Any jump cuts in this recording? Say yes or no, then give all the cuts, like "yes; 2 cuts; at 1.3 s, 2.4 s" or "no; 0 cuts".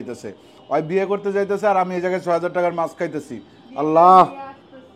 no; 0 cuts